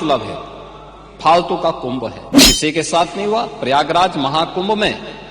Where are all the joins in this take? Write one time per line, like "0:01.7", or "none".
0:02.3